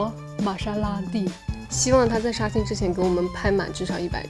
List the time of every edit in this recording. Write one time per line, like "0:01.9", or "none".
0:01.5

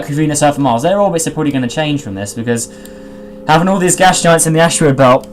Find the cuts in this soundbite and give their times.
none

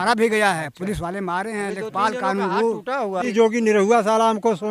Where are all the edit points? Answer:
0:03.2

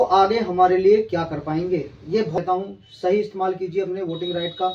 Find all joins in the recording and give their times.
0:02.4

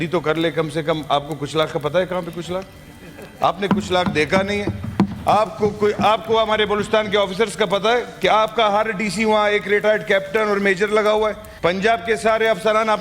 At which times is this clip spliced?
0:11.5

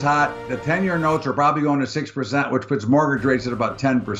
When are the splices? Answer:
none

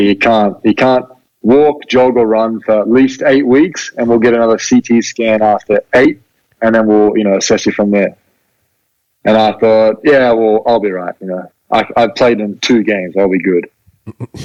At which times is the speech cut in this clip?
none

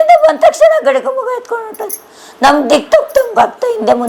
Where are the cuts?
none

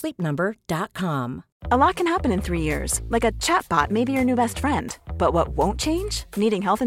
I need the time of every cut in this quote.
0:01.5

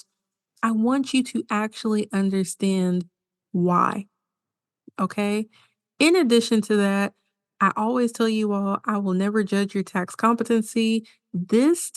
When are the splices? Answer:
none

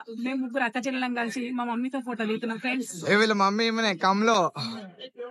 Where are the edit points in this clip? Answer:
none

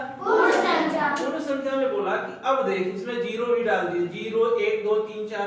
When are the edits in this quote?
none

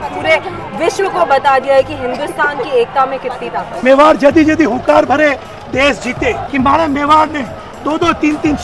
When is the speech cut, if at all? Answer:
0:03.8
0:06.4

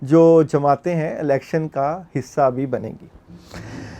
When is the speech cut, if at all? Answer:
none

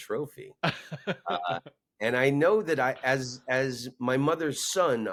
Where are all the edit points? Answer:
none

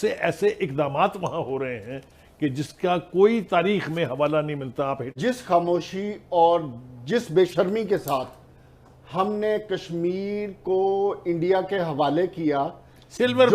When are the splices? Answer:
0:05.2

